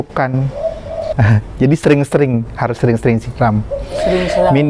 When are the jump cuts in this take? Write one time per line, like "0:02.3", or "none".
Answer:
0:01.0